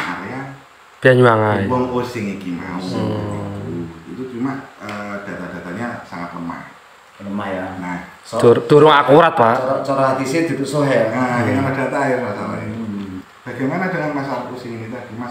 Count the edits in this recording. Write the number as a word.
one